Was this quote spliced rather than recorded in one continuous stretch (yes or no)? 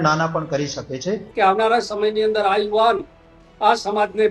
yes